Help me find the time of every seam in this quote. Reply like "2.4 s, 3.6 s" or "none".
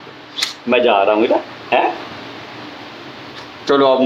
none